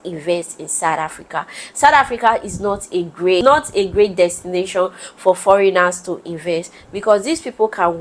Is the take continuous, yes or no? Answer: yes